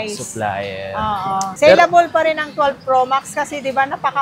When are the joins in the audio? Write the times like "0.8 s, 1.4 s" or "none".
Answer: 1.5 s

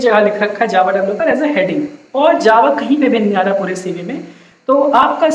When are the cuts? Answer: none

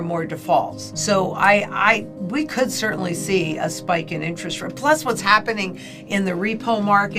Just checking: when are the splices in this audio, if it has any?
none

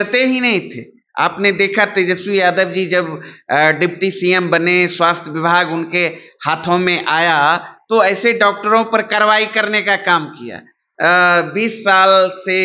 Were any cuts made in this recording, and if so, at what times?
10.8 s

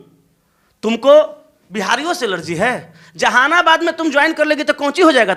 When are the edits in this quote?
none

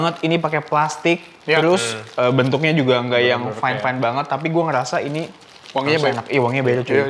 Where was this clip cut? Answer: none

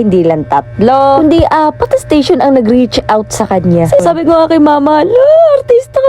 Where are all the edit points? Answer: 4.0 s

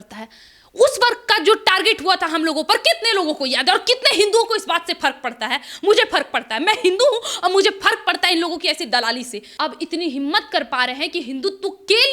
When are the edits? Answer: 9.4 s

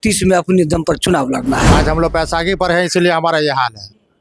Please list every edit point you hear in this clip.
1.7 s

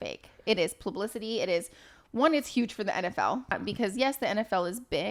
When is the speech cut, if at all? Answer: 3.6 s

